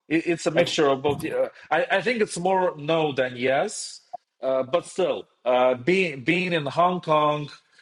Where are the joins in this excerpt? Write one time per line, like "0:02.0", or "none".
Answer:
none

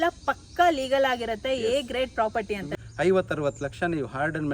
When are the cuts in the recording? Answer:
0:02.6

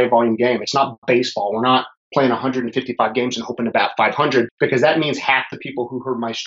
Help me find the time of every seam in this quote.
0:04.5

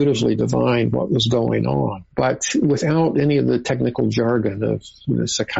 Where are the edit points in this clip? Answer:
0:02.0

